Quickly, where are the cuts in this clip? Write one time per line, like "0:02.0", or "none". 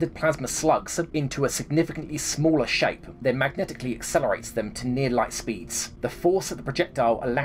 none

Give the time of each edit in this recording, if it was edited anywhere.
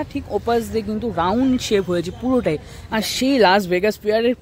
0:03.0

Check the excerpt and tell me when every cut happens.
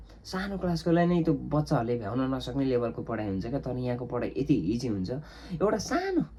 none

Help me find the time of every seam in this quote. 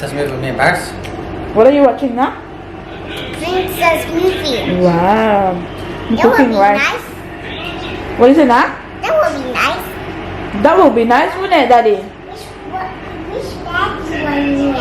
none

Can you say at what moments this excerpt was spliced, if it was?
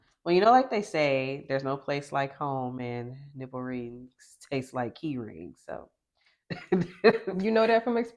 none

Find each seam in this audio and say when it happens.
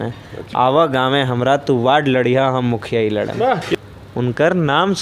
0:03.7

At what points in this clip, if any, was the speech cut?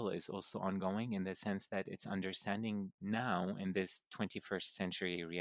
none

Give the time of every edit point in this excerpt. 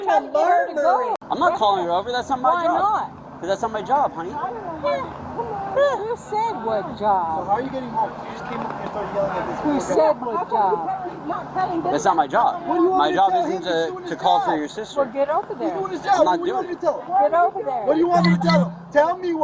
0:01.2

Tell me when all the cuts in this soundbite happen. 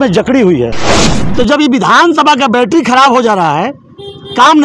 0:01.1

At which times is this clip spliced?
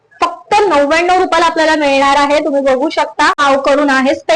0:03.4

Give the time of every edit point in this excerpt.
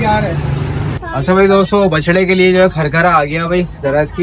0:00.9

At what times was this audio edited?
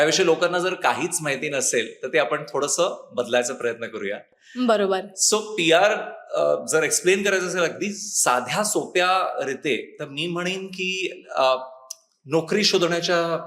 none

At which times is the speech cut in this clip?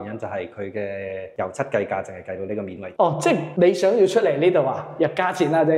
none

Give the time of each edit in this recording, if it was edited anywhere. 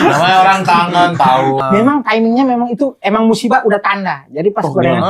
0:01.6

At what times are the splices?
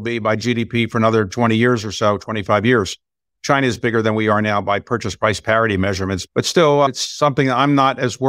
0:03.3
0:06.2
0:06.9

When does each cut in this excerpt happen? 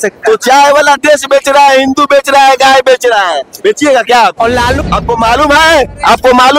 0:04.8

